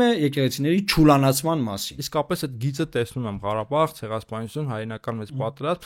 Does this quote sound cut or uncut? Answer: cut